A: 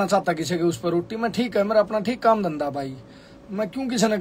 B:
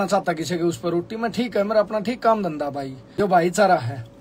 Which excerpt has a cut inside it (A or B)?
B